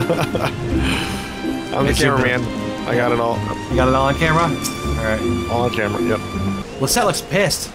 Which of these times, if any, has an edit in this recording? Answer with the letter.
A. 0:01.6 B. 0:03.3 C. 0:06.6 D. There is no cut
C